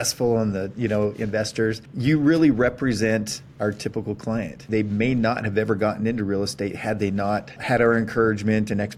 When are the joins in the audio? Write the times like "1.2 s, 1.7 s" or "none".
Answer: 1.9 s, 4.7 s, 7.5 s